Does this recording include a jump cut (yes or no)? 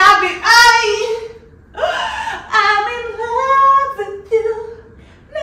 no